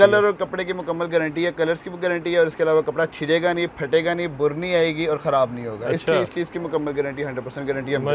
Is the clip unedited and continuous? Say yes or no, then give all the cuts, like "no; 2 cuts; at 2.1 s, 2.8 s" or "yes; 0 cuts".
yes; 0 cuts